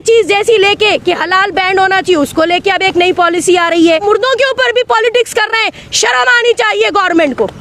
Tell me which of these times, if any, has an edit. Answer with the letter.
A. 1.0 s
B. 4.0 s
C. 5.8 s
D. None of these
B